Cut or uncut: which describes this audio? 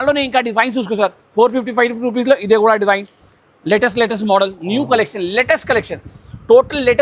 uncut